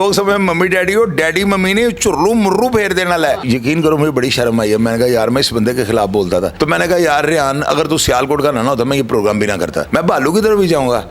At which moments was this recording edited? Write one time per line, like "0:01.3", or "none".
0:03.4
0:06.5
0:09.8